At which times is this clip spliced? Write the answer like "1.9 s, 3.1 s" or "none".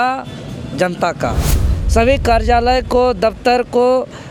1.8 s